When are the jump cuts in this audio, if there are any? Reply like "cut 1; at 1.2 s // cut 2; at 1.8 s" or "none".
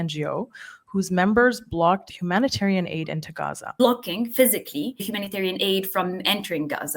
cut 1; at 2.1 s // cut 2; at 3.6 s // cut 3; at 5.1 s